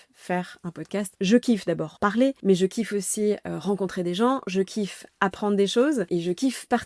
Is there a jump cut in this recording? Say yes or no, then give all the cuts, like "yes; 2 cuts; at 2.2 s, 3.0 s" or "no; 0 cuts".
yes; 3 cuts; at 1.1 s, 2.1 s, 6.1 s